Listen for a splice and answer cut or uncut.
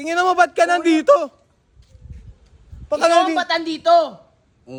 uncut